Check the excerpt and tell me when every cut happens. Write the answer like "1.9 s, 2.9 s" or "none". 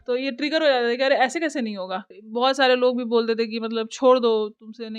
2.2 s